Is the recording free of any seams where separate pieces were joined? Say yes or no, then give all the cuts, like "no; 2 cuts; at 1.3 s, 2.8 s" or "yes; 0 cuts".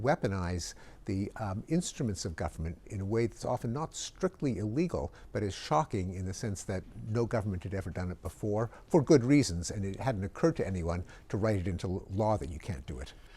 yes; 0 cuts